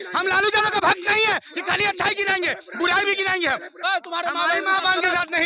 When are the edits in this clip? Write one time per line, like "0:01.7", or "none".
0:03.8